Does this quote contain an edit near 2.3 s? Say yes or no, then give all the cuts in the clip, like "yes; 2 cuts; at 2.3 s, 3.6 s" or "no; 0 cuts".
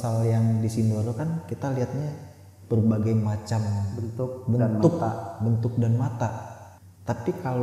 no; 0 cuts